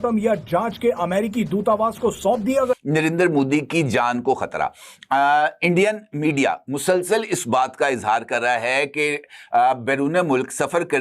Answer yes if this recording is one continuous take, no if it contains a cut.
no